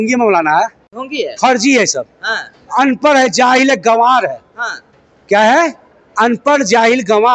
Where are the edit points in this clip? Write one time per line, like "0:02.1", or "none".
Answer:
none